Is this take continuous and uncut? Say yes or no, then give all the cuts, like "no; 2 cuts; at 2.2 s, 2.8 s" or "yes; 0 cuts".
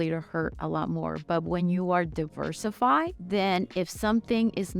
no; 1 cut; at 3.2 s